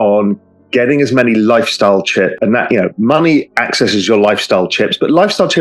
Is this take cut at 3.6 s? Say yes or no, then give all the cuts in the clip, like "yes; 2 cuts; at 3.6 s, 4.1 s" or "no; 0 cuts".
no; 1 cut; at 2.4 s